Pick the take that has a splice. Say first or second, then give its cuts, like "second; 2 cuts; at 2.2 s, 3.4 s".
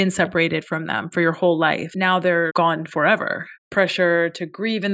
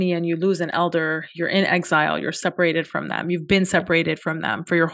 first; 2 cuts; at 2.4 s, 3.6 s